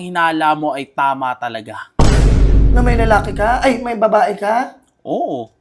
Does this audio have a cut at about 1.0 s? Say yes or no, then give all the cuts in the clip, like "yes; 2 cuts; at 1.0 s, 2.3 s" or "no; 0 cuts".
no; 0 cuts